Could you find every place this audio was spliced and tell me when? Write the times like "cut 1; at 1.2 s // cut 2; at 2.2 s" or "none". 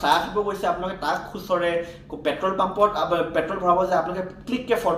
none